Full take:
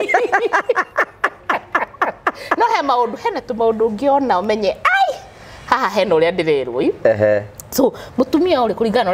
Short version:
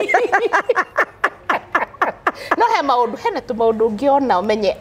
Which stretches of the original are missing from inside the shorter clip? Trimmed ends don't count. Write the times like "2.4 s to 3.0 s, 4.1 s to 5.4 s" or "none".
none